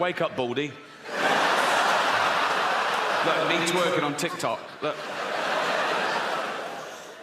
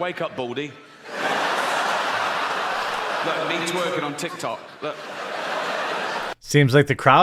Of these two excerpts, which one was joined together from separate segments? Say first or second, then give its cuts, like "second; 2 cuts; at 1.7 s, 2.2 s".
first; 1 cut; at 6.3 s